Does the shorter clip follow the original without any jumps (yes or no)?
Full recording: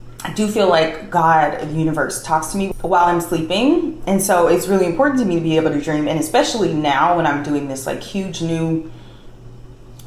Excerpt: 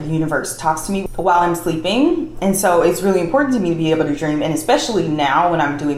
yes